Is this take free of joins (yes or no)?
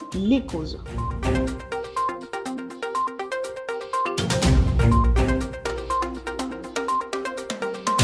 no